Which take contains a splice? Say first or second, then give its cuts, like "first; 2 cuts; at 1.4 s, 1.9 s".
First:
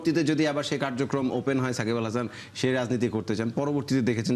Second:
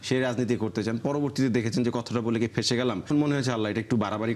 second; 1 cut; at 3.0 s